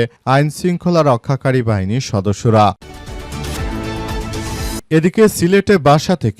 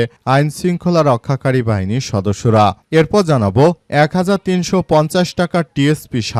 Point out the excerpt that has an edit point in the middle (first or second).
first